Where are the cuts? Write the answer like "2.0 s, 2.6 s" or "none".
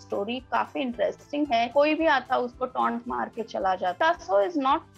1.7 s, 4.0 s

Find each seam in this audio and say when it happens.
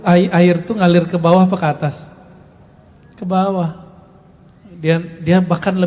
none

